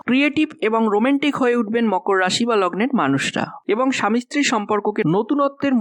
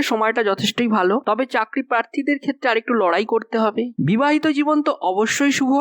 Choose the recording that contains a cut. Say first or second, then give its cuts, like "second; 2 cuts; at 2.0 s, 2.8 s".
second; 1 cut; at 3.9 s